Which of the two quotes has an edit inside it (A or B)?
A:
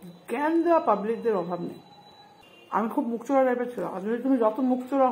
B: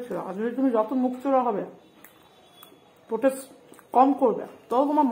A